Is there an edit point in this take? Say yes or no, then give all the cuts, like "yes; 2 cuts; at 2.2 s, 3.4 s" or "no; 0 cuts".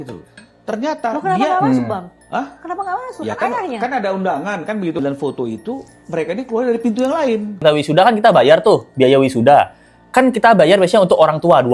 yes; 2 cuts; at 5.0 s, 7.6 s